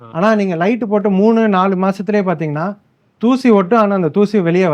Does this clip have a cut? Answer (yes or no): no